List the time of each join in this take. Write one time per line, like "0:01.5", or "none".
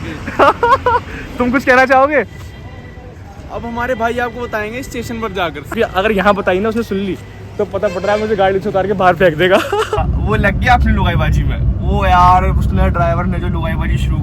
0:05.7
0:10.0